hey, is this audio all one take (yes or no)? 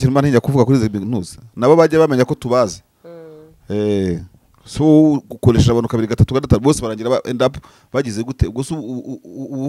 yes